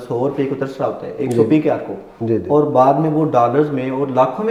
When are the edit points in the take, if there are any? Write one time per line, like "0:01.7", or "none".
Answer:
none